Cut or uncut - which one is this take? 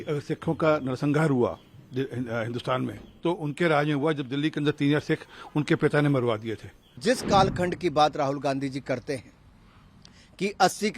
cut